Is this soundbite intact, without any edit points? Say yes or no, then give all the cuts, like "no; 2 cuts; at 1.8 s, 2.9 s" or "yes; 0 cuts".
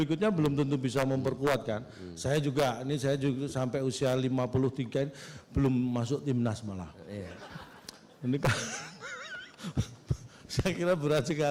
yes; 0 cuts